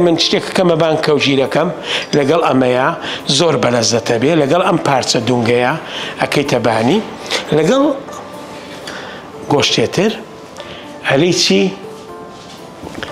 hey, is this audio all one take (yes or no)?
yes